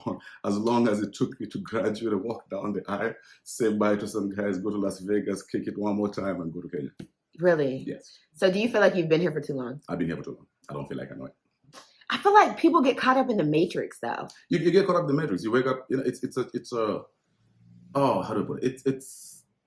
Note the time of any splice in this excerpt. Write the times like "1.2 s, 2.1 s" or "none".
none